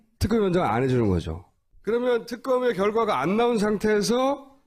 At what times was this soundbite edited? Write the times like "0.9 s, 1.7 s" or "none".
none

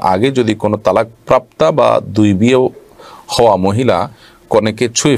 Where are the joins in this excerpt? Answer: none

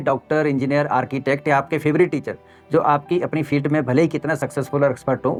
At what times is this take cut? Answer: none

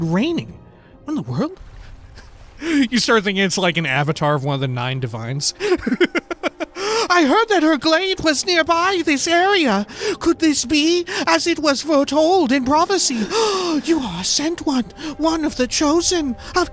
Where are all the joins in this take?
5.5 s

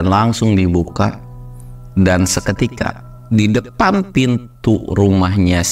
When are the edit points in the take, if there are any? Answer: none

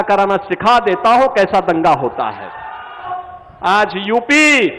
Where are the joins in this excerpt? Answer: 3.1 s

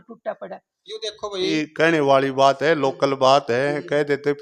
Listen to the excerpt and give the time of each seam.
1.5 s

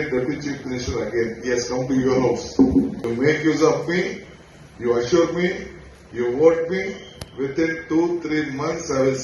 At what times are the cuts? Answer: 3.0 s

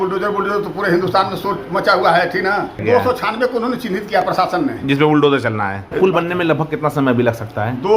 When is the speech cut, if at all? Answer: 2.8 s, 5.8 s

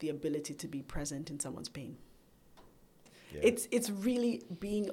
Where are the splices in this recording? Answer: 3.0 s

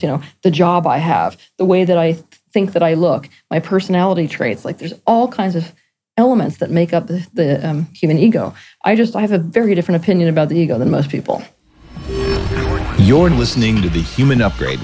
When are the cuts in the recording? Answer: 11.7 s

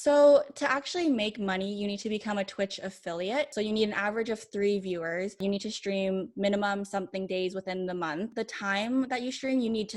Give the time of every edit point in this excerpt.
3.5 s, 5.4 s, 8.4 s

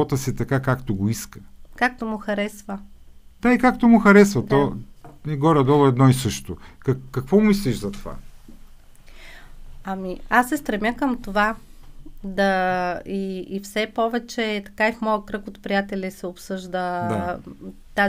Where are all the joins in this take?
none

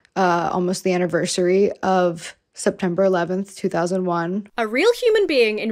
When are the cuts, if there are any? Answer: 4.4 s

